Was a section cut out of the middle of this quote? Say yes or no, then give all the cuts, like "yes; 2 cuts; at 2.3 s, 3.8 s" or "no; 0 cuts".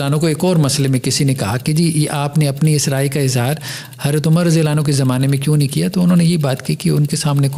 no; 0 cuts